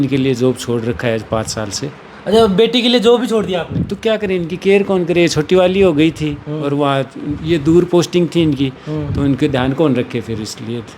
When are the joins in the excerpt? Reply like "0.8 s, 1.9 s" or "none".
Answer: none